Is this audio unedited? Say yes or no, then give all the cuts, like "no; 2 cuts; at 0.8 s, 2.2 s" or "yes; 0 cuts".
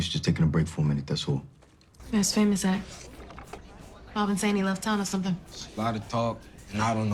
no; 1 cut; at 2.0 s